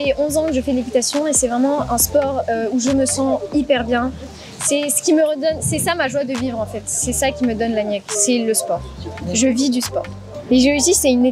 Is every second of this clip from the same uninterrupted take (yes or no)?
no